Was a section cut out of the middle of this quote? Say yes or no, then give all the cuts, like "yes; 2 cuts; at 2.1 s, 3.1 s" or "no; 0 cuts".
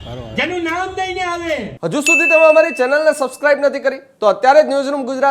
yes; 1 cut; at 1.7 s